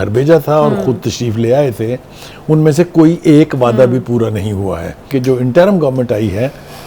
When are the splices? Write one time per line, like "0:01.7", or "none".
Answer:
0:05.1